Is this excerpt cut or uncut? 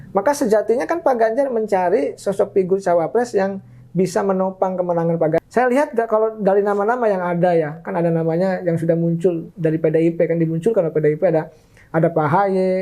cut